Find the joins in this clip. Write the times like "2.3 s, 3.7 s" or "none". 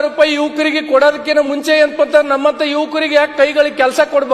none